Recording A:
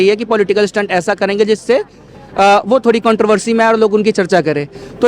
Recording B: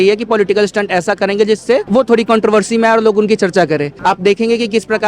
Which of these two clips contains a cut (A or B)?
B